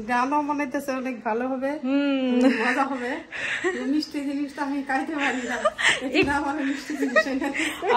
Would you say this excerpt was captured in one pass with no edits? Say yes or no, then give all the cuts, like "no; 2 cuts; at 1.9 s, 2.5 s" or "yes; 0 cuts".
yes; 0 cuts